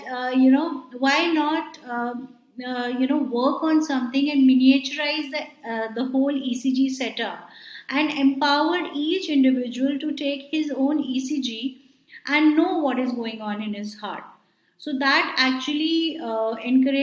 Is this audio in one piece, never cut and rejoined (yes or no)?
yes